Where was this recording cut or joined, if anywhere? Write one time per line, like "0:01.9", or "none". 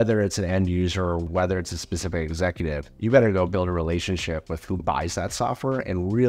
0:01.3